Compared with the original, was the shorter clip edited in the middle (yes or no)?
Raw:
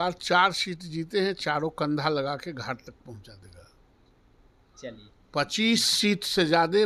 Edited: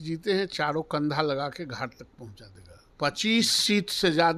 yes